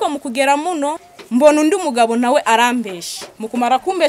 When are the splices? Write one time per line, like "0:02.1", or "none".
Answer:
0:01.1